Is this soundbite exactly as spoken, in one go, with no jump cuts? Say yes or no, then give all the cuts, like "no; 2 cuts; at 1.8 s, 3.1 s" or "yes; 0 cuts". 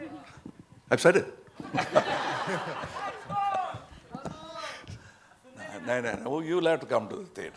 yes; 0 cuts